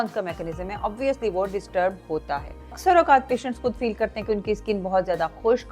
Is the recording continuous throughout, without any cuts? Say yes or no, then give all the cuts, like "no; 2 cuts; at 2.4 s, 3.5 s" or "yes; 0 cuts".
no; 1 cut; at 2.8 s